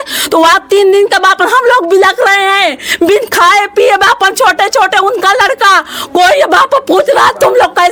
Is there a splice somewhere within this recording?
no; 0 cuts

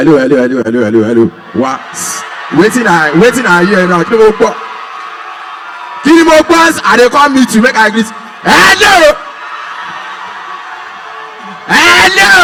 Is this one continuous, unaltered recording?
yes; 0 cuts

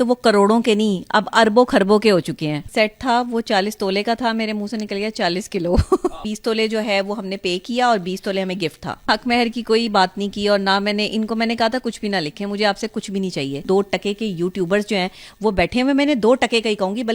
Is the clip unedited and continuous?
no; 4 cuts; at 2.6 s, 6.2 s, 9.1 s, 13.6 s

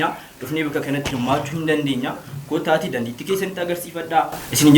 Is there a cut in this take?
no; 0 cuts

